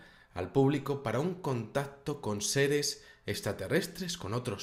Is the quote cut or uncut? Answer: uncut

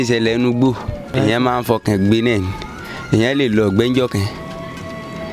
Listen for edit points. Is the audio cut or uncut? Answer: cut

